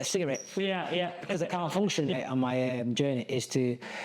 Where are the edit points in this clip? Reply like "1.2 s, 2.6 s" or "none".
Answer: 2.1 s

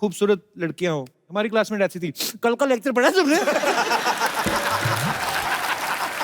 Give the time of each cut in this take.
1.2 s

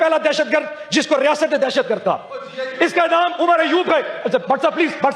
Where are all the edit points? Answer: none

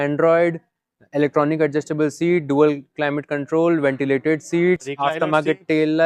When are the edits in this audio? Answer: none

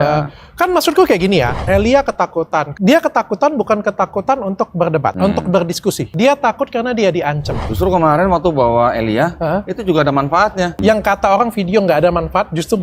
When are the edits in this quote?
1.6 s, 2.7 s, 5.2 s, 6.1 s, 7.6 s, 10.8 s

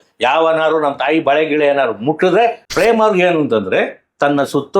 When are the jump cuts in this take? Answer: 2.6 s

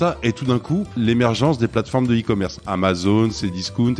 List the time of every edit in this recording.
0.9 s

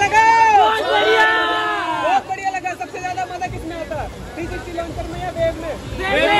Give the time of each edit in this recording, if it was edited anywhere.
none

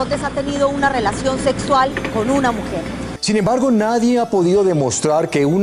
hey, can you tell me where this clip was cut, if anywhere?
3.1 s

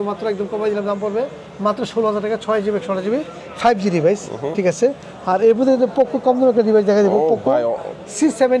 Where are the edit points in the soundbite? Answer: none

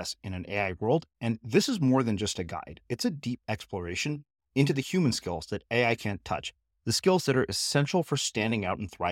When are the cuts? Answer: none

